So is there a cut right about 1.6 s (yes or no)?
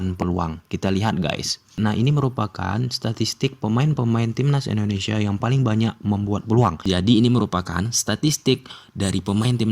yes